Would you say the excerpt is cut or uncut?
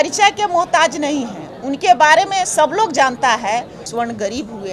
cut